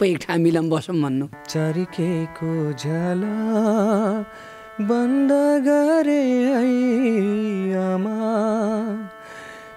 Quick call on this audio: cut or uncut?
cut